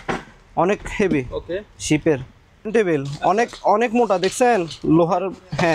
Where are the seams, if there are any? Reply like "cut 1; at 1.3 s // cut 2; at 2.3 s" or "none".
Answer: cut 1; at 2.7 s